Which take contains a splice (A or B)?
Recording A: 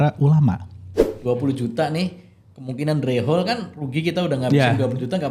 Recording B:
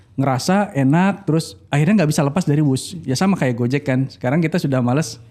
A